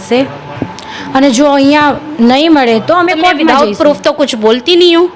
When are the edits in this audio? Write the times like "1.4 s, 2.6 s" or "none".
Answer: 3.5 s